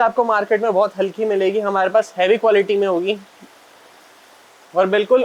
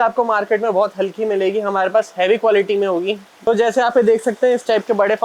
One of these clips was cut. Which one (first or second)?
second